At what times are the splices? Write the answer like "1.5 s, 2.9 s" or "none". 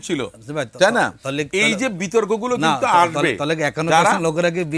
none